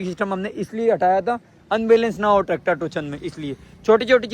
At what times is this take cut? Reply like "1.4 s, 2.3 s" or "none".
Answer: none